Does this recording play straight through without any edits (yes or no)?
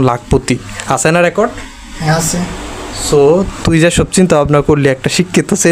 yes